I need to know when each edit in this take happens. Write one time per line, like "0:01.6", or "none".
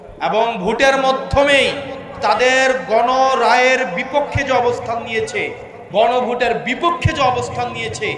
none